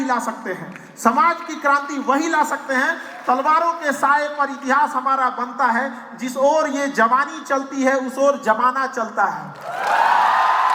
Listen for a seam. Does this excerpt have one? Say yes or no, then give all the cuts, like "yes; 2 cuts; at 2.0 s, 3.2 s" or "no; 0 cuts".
no; 0 cuts